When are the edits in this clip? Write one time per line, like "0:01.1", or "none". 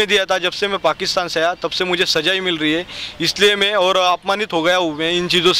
none